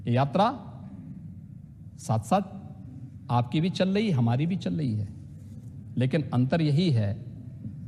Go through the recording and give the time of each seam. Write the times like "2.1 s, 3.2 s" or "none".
none